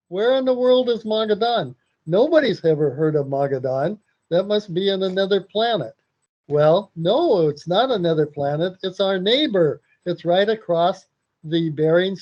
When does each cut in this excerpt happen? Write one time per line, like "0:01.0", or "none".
none